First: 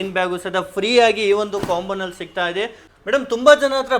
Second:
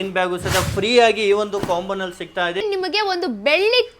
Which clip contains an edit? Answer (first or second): second